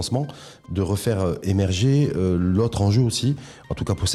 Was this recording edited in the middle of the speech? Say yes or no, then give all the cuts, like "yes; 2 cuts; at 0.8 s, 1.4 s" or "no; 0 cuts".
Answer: no; 0 cuts